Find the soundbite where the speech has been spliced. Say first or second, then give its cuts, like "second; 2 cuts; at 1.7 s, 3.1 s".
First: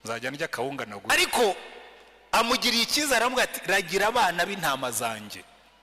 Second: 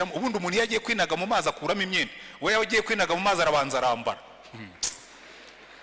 first; 1 cut; at 1.1 s